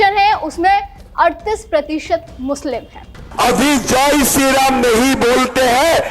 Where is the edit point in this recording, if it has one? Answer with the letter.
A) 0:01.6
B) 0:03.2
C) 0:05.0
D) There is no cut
B